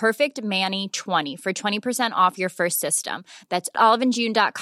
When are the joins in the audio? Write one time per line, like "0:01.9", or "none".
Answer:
0:01.3